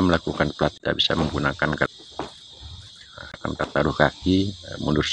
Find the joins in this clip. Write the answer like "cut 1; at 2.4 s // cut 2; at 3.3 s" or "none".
cut 1; at 0.7 s // cut 2; at 1.8 s // cut 3; at 3.4 s